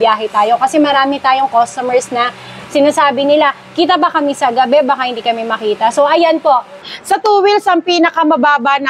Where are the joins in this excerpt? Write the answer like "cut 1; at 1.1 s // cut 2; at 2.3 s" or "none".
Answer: cut 1; at 6.9 s